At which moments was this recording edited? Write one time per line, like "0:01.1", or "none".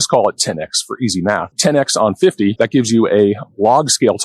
0:01.5
0:02.5